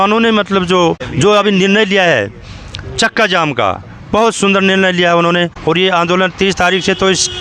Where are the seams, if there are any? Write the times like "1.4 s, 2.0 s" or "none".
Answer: 1.1 s, 5.5 s